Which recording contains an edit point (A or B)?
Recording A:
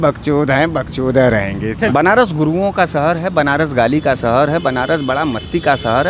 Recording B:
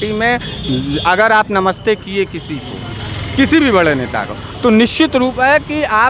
A